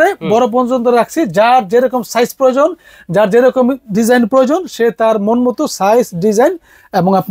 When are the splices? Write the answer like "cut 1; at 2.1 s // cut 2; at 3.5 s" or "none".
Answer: none